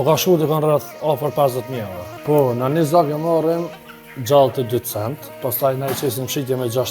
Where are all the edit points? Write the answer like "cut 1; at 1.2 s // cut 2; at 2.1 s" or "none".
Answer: cut 1; at 2.1 s // cut 2; at 5.4 s